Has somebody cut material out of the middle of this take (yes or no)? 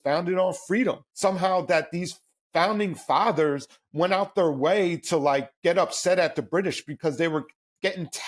yes